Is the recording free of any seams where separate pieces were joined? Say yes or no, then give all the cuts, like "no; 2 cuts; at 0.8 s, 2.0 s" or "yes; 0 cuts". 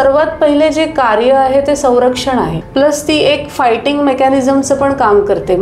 no; 1 cut; at 2.6 s